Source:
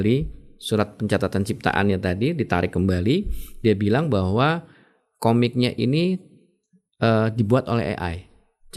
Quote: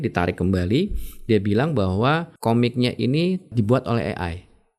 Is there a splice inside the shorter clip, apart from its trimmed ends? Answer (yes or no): yes